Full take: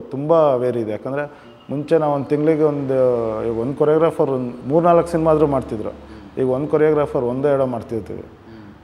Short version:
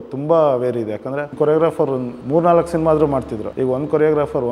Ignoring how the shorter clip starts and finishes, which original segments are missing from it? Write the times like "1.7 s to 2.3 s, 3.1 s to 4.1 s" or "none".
1.3 s to 3.7 s, 5.8 s to 6.2 s